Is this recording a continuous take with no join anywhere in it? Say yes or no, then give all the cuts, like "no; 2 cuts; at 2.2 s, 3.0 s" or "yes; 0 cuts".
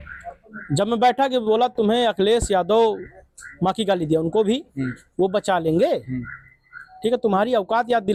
yes; 0 cuts